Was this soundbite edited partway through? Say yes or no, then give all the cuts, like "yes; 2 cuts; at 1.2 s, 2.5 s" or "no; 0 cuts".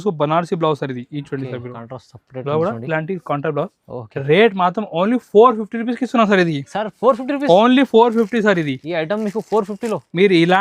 no; 0 cuts